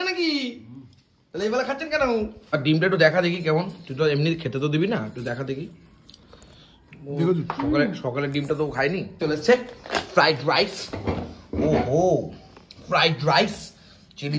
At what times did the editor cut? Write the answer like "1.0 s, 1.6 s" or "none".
2.4 s, 9.1 s